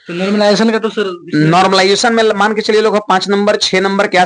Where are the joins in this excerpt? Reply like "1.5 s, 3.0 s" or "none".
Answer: none